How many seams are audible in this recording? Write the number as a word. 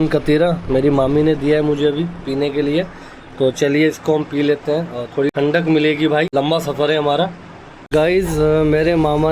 three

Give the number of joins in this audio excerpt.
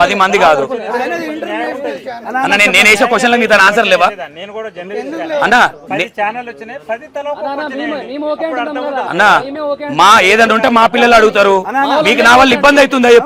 zero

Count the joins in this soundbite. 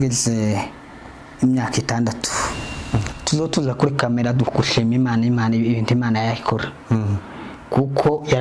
one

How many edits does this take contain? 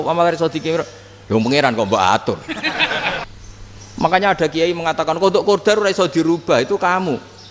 one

